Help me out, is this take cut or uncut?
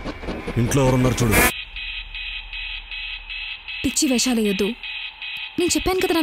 cut